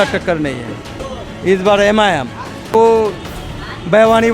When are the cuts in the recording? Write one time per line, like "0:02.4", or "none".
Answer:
0:01.0
0:02.7